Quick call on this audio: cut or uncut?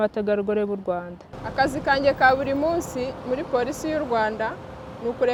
uncut